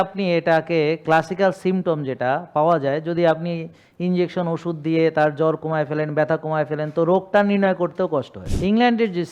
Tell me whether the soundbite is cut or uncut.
cut